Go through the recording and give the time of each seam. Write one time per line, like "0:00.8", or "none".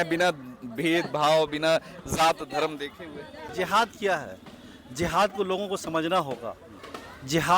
0:03.4